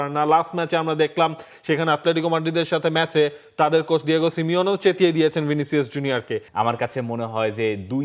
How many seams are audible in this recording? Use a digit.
1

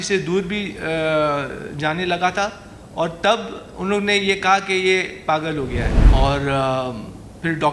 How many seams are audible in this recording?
1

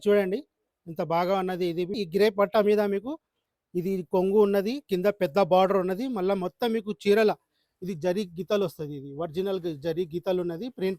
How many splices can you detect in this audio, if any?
1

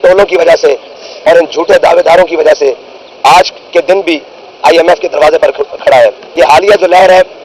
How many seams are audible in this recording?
1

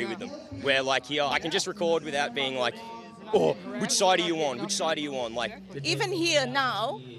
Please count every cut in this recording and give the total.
2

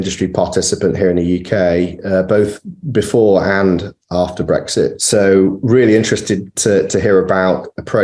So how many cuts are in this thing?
1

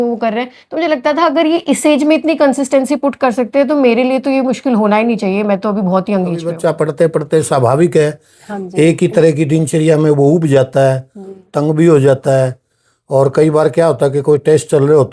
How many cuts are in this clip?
1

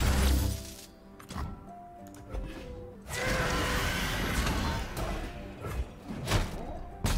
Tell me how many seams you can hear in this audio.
1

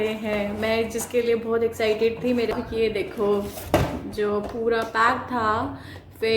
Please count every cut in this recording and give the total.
1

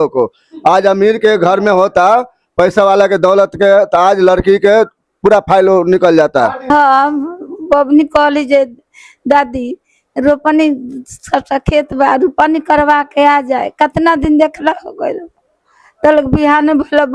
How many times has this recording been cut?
1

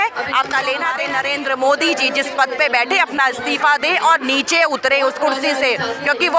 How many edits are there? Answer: 1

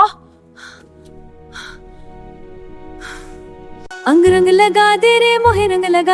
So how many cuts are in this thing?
1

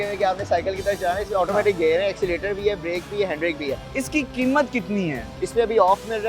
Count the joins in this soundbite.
2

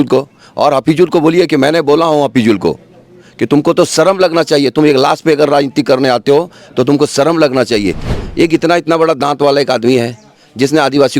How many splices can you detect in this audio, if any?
1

